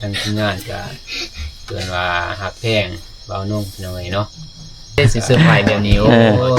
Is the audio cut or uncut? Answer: cut